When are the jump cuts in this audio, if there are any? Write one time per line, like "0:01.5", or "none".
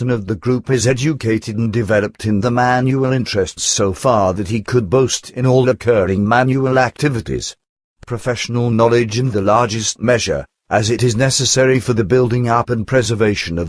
0:04.9

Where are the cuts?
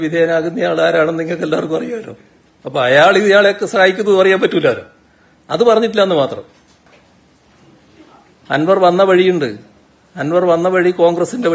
0:06.8

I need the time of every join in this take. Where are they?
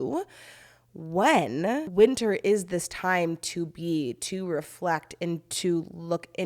0:01.9

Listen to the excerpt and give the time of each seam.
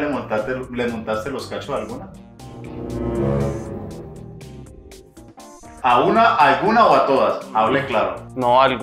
none

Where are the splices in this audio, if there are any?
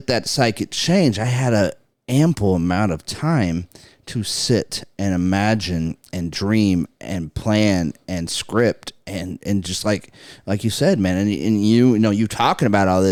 none

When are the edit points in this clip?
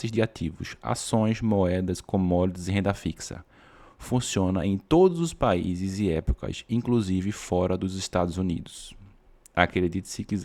none

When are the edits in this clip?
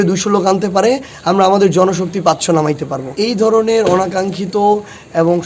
0:03.1

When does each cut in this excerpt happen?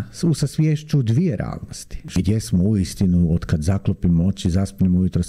0:02.1

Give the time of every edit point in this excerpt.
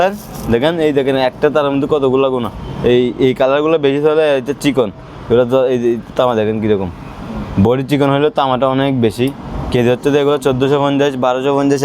none

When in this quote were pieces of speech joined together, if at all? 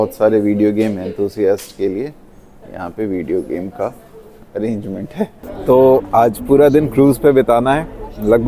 0:05.5

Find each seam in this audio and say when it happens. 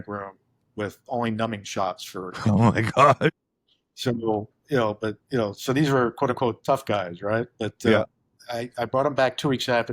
0:07.9

